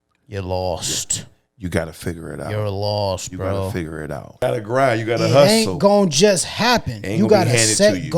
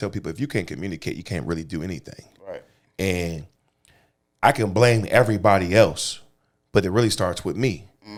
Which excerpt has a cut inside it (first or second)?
first